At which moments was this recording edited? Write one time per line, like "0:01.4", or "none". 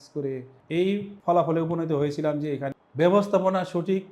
0:00.9
0:02.7